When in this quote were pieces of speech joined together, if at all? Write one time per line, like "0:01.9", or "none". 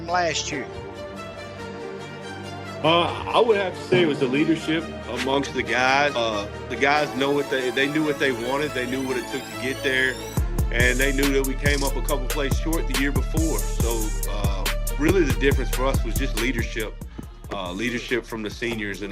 0:06.1